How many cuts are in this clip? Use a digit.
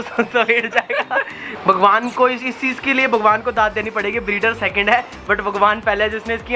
1